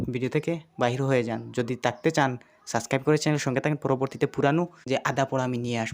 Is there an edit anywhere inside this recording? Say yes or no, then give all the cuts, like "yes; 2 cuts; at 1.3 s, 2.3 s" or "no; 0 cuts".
yes; 1 cut; at 4.8 s